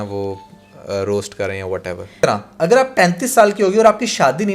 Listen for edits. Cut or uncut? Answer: cut